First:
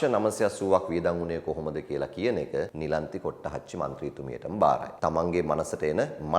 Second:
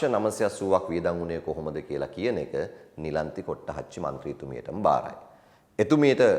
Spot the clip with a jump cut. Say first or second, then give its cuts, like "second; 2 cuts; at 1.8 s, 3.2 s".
first; 2 cuts; at 2.7 s, 4.9 s